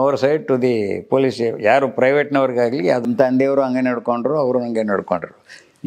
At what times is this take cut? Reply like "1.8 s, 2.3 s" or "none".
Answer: 3.1 s